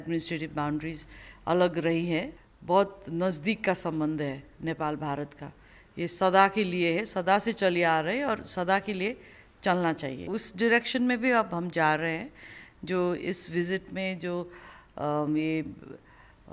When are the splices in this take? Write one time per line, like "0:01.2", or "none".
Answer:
0:02.4
0:10.3